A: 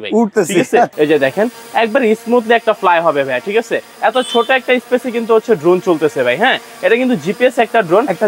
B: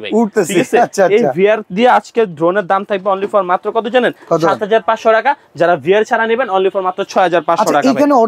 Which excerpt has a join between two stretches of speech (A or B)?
A